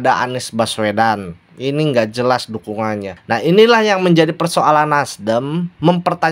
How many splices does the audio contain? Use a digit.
1